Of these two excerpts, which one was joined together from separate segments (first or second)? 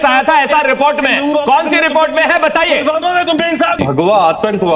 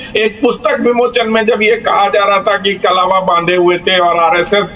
first